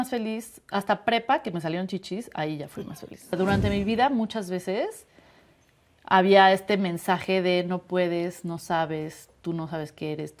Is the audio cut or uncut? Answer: cut